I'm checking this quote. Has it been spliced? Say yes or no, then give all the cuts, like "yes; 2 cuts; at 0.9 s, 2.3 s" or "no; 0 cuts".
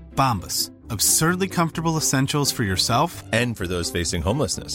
no; 0 cuts